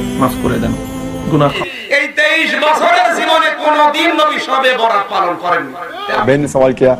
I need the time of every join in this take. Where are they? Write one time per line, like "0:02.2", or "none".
0:01.5
0:06.2

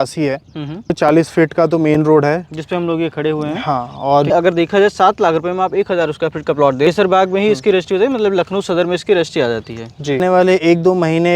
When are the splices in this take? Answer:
0:00.9
0:04.3
0:06.9
0:10.2

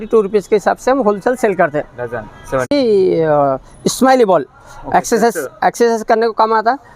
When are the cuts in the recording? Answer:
0:02.7

